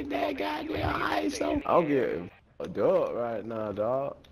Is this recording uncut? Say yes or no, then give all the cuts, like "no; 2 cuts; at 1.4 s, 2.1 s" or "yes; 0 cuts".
no; 1 cut; at 1.6 s